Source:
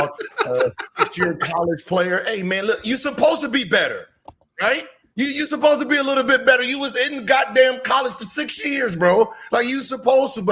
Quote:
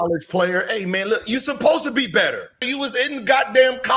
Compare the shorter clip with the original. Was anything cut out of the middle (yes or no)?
yes